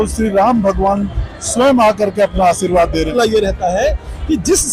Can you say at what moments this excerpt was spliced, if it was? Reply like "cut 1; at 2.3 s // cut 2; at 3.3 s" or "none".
cut 1; at 3.1 s